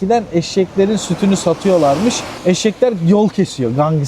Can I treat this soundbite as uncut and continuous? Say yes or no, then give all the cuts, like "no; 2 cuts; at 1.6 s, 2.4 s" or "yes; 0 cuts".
no; 1 cut; at 2.3 s